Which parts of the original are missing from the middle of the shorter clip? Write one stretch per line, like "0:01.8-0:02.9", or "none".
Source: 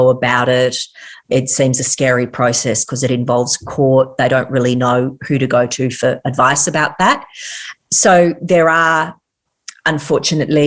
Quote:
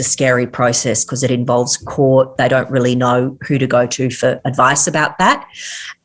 none